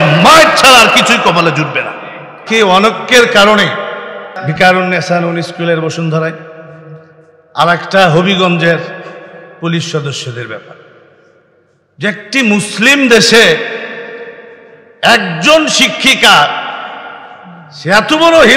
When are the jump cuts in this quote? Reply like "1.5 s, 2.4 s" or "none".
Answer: 2.4 s, 4.4 s